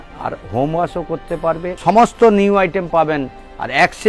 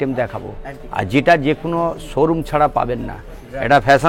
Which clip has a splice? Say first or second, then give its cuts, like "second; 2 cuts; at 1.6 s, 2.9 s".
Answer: first; 1 cut; at 1.7 s